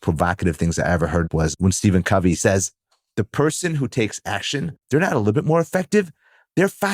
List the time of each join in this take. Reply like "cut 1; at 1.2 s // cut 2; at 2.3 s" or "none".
cut 1; at 1.3 s // cut 2; at 2.4 s // cut 3; at 4.7 s